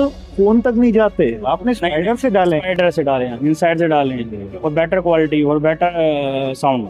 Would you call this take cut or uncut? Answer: uncut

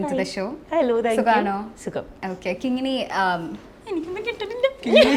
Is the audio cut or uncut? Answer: uncut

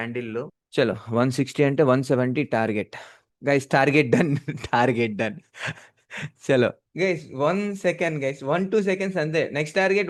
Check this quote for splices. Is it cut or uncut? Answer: uncut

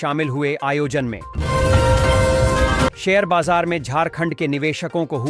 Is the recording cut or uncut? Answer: cut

